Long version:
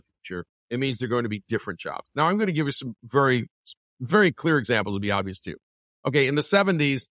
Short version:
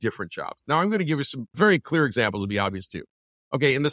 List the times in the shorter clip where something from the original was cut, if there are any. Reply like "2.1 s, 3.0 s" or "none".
1.4 s